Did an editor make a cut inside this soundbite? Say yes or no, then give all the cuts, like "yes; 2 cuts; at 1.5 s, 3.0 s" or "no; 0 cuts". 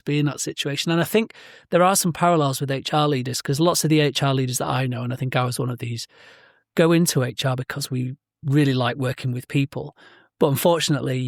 no; 0 cuts